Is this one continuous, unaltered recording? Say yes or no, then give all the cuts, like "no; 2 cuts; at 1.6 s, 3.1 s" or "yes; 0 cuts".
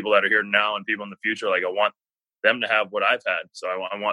yes; 0 cuts